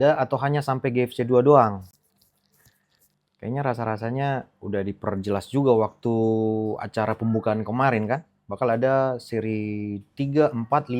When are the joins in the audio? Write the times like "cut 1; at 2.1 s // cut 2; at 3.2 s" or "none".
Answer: none